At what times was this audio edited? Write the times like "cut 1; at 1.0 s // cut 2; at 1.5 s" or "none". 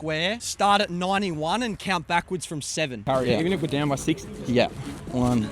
cut 1; at 3.0 s